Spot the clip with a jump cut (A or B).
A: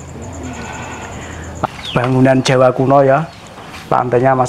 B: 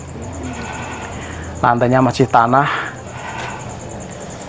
A